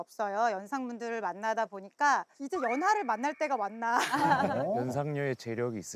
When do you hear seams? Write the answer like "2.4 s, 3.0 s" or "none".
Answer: 2.4 s, 4.5 s